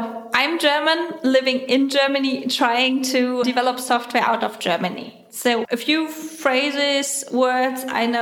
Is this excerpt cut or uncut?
cut